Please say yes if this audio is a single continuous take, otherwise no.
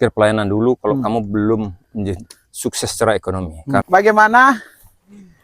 no